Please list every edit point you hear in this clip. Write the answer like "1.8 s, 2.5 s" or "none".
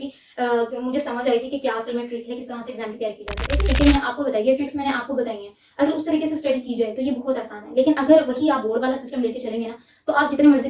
3.7 s